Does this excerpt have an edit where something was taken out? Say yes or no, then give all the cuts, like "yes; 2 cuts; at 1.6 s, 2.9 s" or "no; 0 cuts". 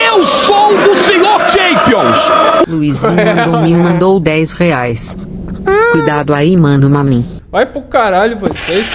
yes; 1 cut; at 7.4 s